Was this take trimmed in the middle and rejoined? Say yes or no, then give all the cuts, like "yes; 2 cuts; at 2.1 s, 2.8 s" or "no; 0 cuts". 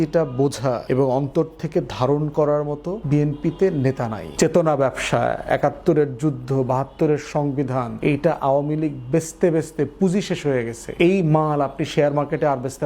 yes; 5 cuts; at 0.8 s, 2.9 s, 4.2 s, 7.9 s, 10.8 s